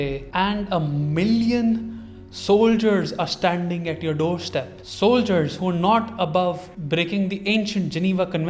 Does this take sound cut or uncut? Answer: uncut